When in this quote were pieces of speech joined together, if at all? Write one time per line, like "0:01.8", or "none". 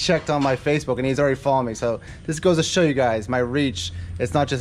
none